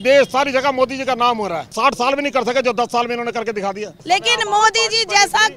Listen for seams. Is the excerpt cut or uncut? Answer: cut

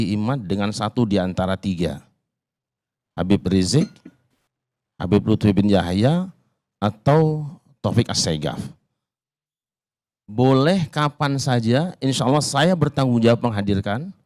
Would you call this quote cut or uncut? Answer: uncut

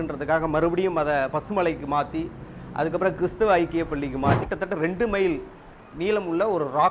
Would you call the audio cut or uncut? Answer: cut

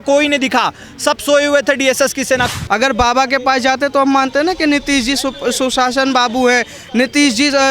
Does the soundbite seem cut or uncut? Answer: cut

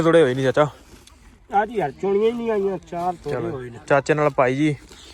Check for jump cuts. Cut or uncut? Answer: uncut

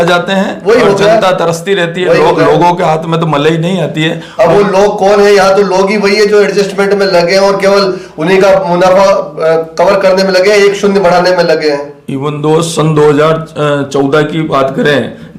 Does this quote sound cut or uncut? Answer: uncut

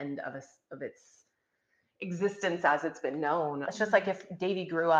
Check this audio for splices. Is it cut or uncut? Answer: cut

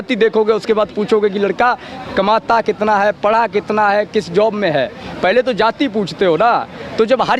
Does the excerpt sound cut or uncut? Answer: uncut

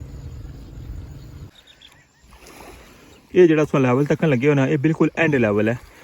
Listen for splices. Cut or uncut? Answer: cut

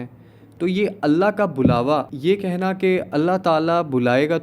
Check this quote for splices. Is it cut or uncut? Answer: cut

